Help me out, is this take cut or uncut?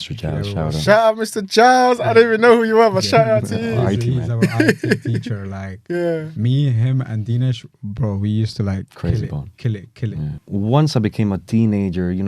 cut